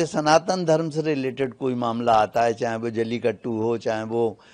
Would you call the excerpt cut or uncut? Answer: uncut